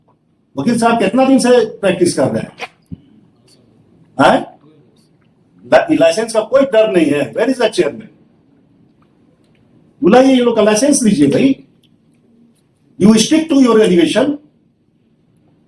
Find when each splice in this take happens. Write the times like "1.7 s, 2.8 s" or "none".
none